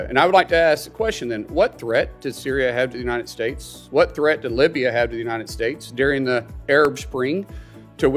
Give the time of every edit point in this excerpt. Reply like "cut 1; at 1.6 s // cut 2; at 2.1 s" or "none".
none